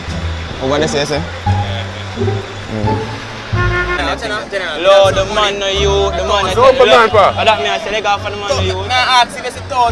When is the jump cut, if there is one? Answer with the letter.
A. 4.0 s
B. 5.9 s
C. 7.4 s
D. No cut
A